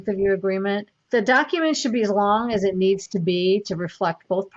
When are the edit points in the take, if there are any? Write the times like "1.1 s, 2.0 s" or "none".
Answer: 0.9 s